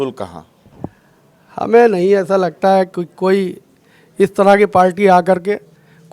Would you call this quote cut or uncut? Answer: uncut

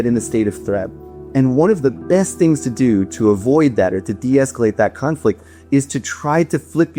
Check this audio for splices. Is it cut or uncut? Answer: uncut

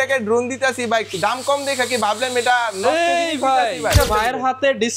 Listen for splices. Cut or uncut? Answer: cut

